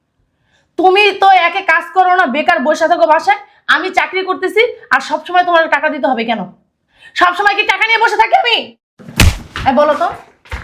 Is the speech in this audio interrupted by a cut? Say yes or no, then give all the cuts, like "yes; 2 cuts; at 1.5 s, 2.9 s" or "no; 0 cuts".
no; 0 cuts